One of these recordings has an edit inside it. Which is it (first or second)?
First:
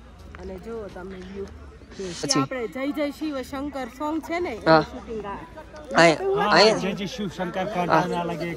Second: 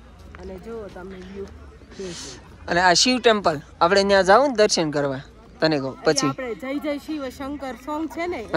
first